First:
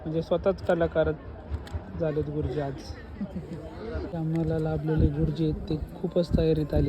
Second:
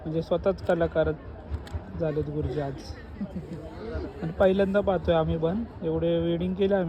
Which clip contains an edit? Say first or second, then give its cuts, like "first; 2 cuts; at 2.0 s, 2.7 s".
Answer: first; 1 cut; at 4.2 s